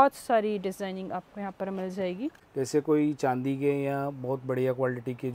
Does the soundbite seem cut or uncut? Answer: cut